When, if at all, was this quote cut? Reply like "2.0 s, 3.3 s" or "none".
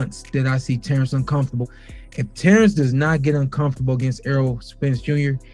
none